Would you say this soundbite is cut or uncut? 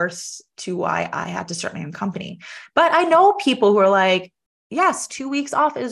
uncut